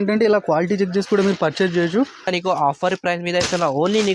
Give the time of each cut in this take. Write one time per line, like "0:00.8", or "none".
0:02.3